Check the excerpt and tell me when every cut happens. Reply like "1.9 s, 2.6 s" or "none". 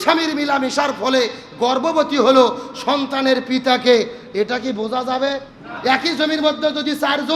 5.7 s

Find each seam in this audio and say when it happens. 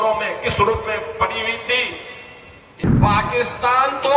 2.6 s

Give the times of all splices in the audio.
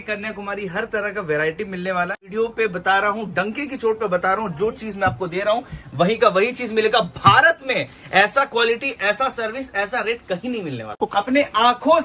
2.2 s, 10.9 s

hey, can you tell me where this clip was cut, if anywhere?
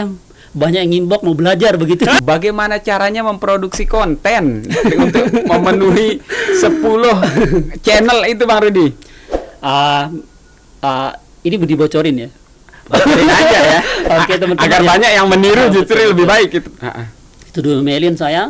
2.2 s, 16.7 s

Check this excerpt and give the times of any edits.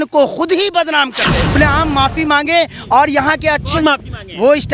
1.5 s

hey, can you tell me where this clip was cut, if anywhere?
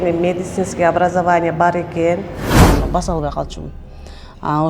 2.6 s

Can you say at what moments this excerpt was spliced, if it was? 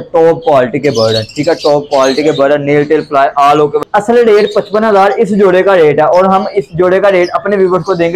3.8 s

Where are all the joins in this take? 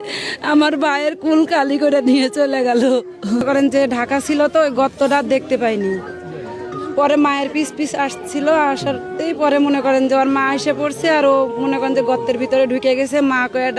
3.4 s

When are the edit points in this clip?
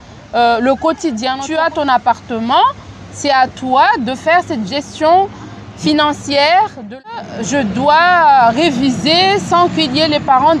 1.4 s, 7.1 s

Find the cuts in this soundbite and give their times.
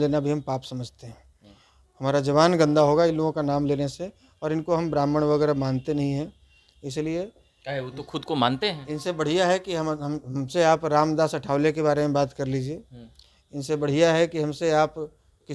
none

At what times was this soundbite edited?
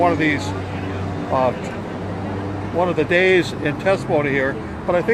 none

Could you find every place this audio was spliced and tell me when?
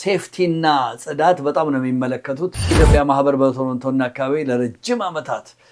2.7 s

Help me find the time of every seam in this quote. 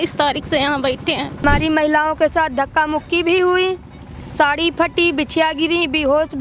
1.4 s

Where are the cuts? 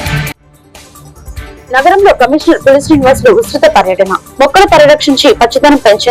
1.6 s

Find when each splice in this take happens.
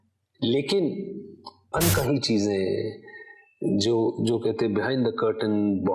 1.6 s

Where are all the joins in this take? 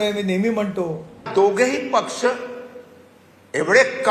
1.3 s

